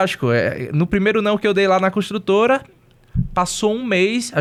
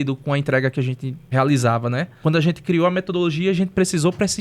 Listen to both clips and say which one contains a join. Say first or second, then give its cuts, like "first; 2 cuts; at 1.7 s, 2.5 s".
second; 2 cuts; at 1.1 s, 2.2 s